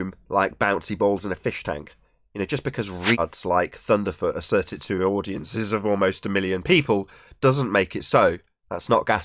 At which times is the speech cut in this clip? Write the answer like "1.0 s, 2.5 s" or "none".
3.2 s